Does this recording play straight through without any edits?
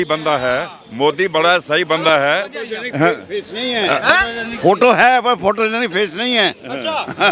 yes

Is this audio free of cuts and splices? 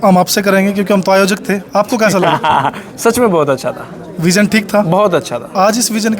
yes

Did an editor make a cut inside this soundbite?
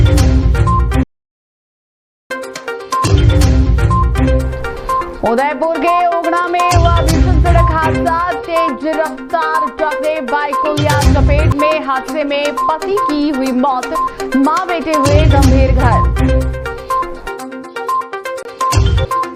no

